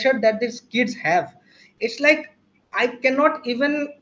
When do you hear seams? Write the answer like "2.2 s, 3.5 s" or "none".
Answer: none